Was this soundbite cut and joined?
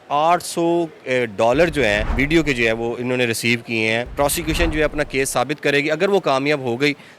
yes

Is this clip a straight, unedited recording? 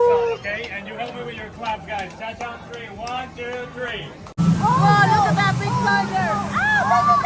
no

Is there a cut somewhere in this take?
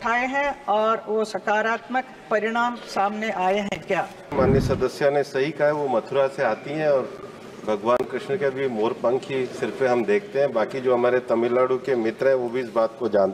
yes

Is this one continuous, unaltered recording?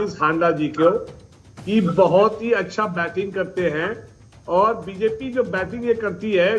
yes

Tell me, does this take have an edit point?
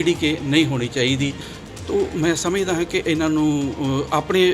yes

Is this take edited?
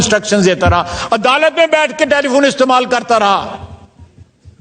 no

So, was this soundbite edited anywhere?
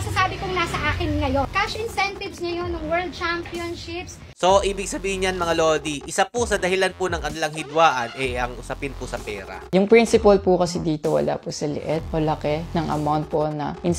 yes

